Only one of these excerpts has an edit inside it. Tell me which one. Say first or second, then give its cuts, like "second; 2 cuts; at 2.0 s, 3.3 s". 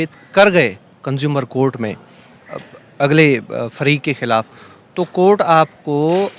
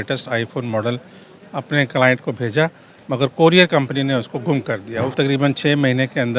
second; 1 cut; at 5.1 s